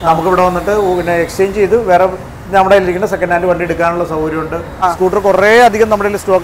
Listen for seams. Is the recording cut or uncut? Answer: cut